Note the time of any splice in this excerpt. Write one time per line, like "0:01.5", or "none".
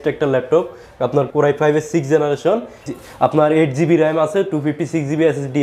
none

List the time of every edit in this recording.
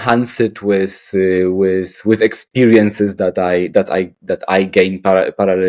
none

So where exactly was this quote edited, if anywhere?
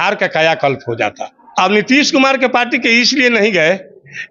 0:01.5

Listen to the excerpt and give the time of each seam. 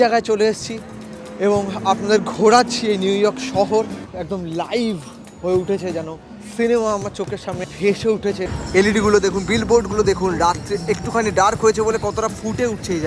0:04.1
0:07.7
0:08.5

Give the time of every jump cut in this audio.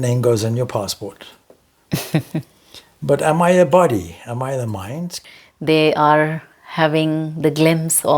0:05.2

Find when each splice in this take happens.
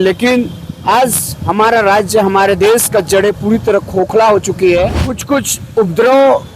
0:05.1

